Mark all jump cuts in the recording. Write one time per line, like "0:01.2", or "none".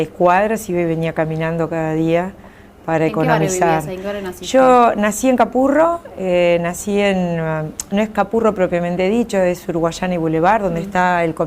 0:08.0